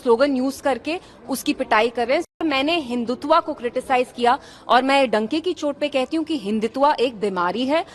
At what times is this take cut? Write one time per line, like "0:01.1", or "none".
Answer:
0:02.4